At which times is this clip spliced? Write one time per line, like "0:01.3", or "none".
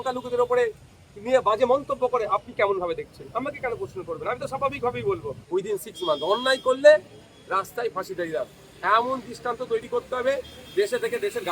0:05.3